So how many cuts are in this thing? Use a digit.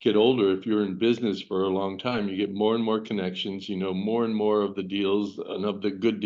0